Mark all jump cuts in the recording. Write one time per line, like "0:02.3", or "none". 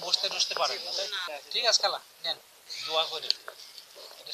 0:01.2

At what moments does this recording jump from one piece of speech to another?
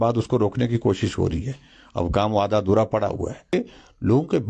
0:03.5

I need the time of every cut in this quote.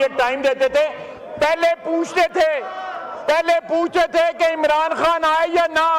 none

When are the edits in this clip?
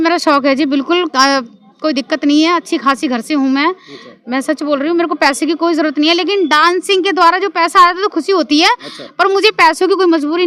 none

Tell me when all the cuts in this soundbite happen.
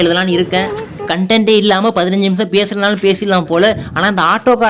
0:01.1

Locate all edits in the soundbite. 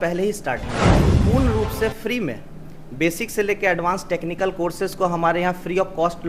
0:01.1

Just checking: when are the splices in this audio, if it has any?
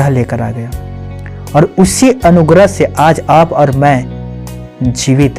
none

